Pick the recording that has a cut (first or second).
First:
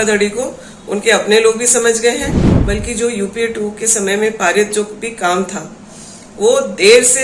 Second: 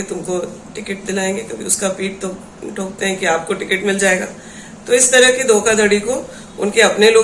first